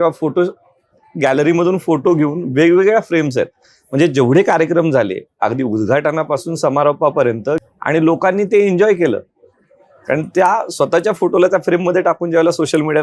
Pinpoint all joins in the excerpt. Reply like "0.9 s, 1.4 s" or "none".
7.7 s